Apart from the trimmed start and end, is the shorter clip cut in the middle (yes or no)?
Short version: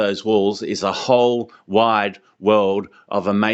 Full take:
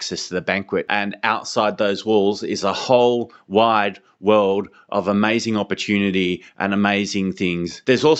no